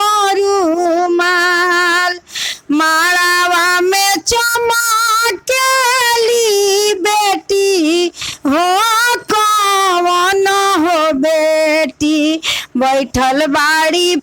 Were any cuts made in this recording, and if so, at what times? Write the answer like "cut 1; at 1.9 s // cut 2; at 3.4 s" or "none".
none